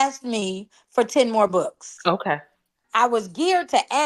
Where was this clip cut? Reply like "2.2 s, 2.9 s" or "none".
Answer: 2.8 s